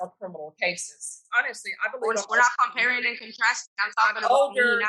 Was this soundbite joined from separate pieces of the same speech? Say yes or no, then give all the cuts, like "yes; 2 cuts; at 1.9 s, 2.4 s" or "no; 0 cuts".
yes; 1 cut; at 1.2 s